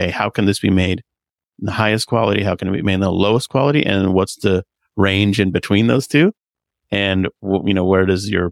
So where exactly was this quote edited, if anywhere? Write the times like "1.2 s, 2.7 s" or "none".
none

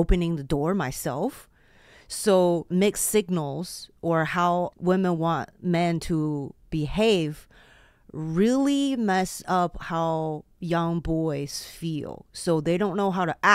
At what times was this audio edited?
2.7 s, 4.7 s

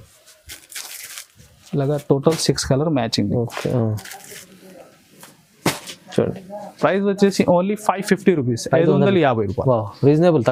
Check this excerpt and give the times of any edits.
none

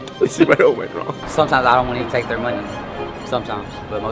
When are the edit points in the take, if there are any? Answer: 1.3 s

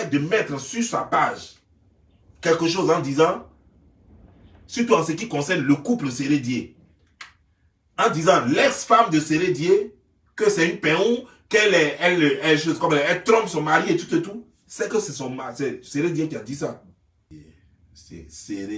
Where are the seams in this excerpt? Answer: 17.3 s

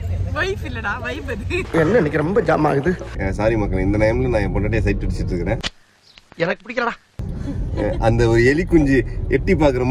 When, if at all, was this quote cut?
3.1 s

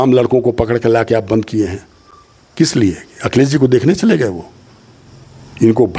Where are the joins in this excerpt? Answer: none

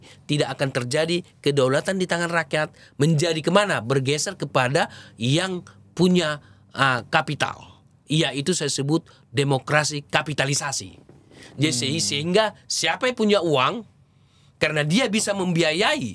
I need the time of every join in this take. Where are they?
none

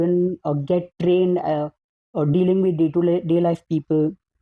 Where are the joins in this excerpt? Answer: none

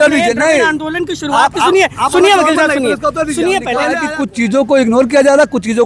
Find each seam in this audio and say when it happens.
4.1 s

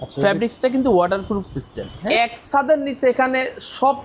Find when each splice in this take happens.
2.0 s

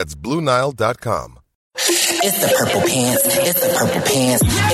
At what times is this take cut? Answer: 2.0 s

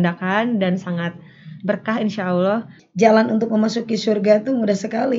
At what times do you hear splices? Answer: 2.8 s

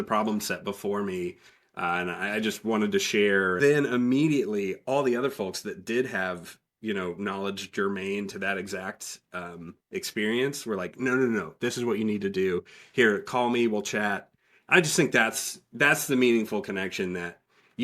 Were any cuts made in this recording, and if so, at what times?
3.6 s

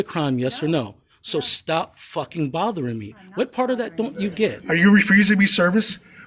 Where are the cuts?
4.6 s

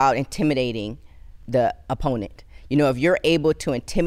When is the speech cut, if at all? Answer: 1.4 s

